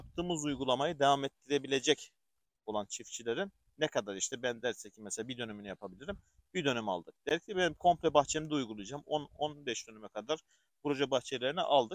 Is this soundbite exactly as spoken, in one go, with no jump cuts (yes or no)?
yes